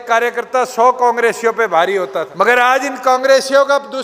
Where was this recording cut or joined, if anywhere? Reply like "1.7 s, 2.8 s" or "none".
2.2 s